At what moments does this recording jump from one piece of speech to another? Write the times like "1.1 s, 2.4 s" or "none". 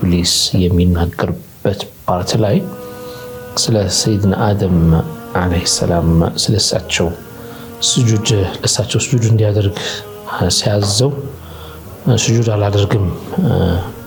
none